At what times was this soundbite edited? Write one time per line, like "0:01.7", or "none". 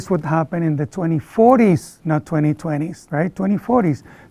none